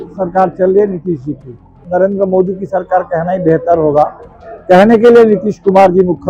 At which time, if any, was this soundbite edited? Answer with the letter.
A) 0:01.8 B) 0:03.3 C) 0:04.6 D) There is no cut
A